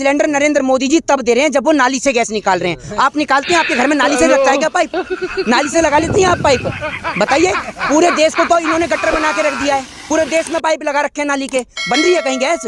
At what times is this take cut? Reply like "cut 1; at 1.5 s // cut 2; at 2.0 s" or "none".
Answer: none